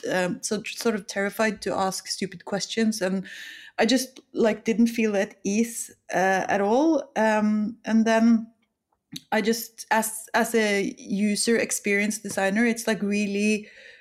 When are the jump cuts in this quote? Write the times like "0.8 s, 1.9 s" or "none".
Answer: none